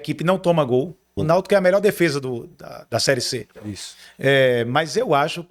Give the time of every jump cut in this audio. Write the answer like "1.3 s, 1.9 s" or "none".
none